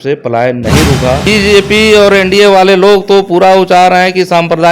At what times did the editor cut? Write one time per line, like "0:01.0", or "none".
0:01.3